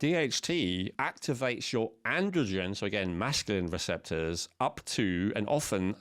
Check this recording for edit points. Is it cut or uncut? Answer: cut